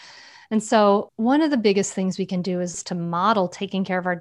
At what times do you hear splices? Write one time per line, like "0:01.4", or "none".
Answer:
0:01.1
0:02.8